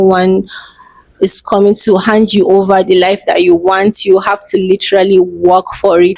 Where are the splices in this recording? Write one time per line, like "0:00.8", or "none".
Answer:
none